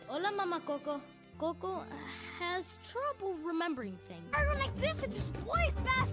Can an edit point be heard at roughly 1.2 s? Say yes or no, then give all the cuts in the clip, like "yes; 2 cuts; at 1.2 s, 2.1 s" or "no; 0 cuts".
yes; 1 cut; at 1.2 s